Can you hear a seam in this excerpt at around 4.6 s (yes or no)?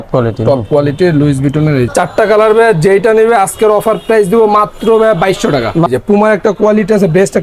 no